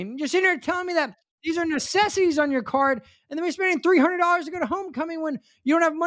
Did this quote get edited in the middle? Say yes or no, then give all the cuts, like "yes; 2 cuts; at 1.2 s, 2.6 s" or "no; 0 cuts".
no; 0 cuts